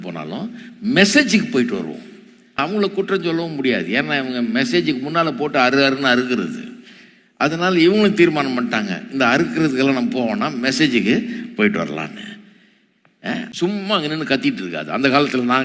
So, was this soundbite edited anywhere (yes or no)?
yes